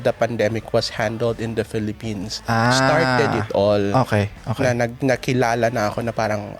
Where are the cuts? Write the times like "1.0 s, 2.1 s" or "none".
none

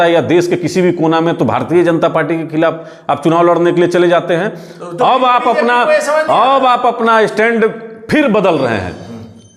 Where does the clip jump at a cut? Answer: none

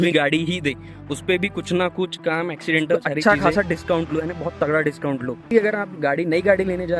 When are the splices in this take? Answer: 3.1 s, 5.5 s

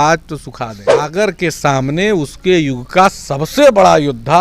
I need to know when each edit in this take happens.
1.1 s

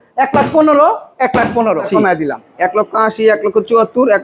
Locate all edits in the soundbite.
1.9 s

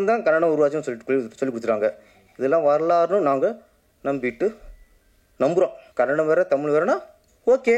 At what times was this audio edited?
5.8 s

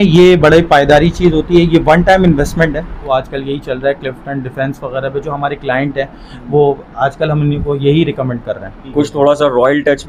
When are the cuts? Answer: 3.1 s, 8.7 s

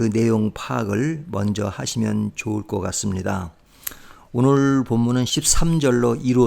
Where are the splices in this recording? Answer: 5.4 s

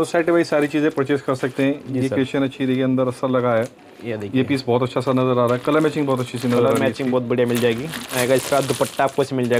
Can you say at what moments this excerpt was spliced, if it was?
none

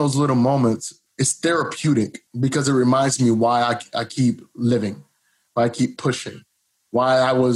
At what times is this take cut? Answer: 1.0 s, 2.2 s

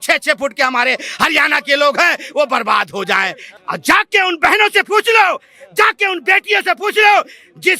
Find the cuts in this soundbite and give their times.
3.5 s

